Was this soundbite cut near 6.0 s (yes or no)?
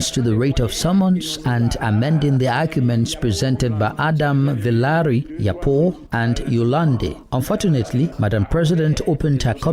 no